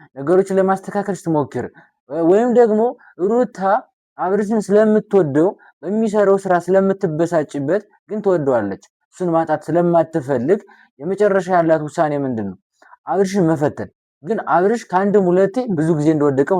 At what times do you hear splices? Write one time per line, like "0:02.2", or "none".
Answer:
none